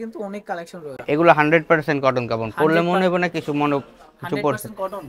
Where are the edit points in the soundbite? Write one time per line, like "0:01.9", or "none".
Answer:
0:01.0